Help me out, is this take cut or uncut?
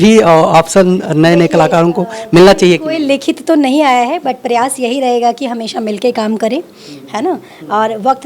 uncut